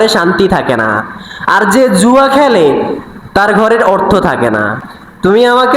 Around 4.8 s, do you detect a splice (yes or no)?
yes